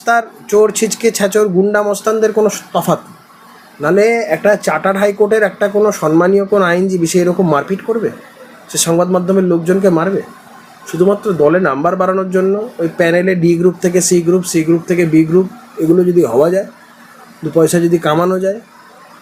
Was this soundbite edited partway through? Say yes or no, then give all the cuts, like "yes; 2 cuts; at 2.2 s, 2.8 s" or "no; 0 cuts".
no; 0 cuts